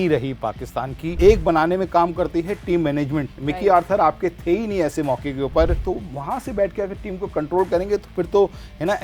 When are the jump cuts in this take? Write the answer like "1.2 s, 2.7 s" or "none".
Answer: 1.2 s, 5.8 s